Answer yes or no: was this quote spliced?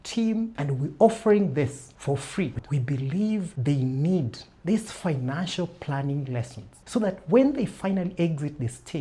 yes